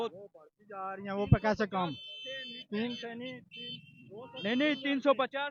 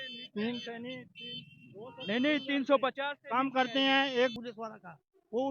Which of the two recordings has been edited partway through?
second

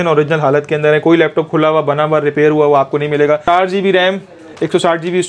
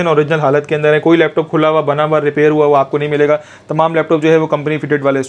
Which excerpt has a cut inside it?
first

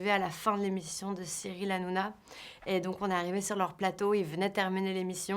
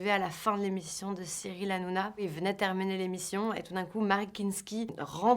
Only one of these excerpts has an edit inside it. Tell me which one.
second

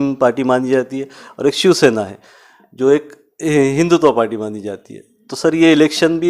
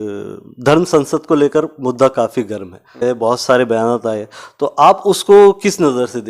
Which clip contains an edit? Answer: second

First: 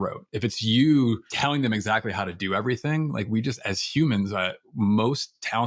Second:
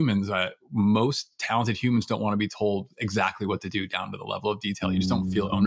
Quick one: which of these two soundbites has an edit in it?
first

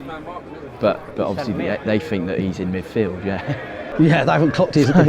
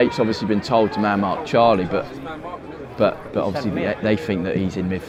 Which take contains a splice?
first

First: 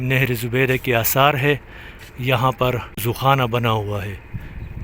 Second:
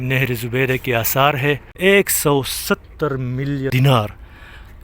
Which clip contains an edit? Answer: second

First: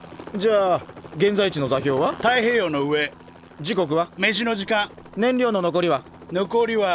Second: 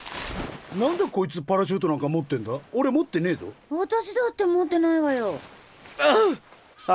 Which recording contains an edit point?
first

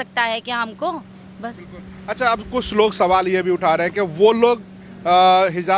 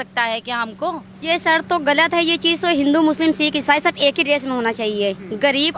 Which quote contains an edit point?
second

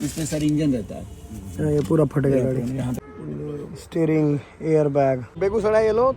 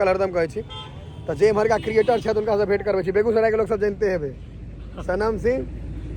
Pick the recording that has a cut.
first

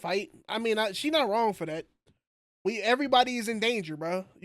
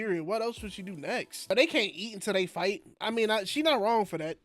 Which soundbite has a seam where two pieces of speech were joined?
second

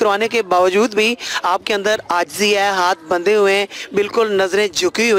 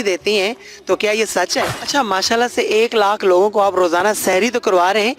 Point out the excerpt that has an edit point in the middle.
second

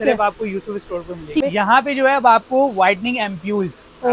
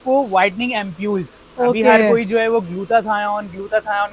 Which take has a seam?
first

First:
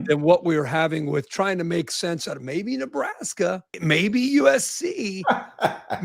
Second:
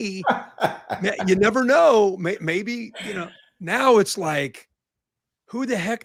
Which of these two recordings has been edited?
first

